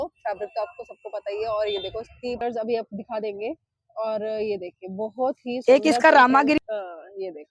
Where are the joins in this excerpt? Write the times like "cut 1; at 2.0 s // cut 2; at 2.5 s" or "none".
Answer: cut 1; at 2.4 s // cut 2; at 6.6 s